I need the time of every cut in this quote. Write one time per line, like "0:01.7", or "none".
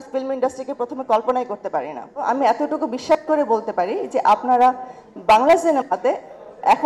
0:02.2